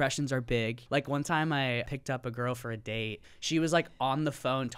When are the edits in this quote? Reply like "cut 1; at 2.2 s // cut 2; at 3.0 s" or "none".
cut 1; at 0.8 s // cut 2; at 1.9 s // cut 3; at 3.3 s